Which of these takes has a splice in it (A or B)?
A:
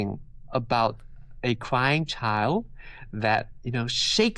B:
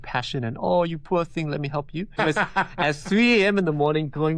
B